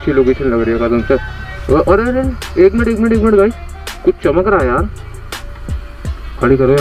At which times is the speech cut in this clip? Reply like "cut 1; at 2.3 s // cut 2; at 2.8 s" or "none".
none